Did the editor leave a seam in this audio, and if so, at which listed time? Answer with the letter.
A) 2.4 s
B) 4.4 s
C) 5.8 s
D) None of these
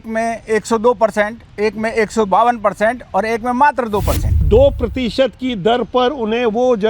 B